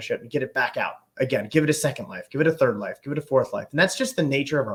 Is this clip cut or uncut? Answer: uncut